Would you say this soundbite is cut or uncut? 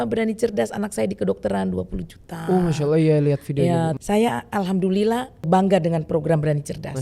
cut